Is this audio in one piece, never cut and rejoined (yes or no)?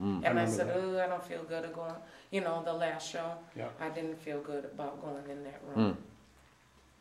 yes